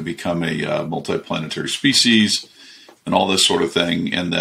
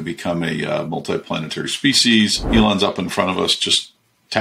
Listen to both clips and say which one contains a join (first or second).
second